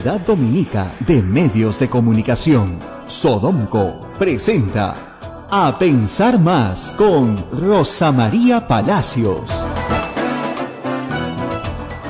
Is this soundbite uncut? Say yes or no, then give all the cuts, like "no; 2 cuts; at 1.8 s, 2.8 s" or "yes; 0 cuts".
yes; 0 cuts